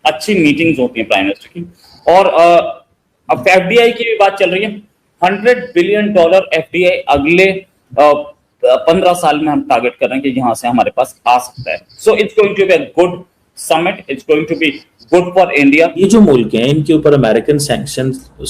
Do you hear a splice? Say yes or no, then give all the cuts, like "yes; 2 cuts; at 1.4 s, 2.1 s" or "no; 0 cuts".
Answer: yes; 1 cut; at 16.0 s